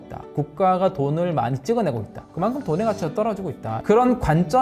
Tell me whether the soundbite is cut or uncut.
cut